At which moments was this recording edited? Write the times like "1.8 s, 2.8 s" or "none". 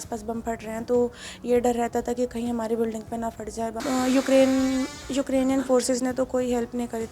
3.8 s